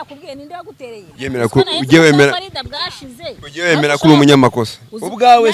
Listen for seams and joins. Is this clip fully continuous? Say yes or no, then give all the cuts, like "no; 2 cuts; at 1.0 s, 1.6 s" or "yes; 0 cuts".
no; 1 cut; at 1.1 s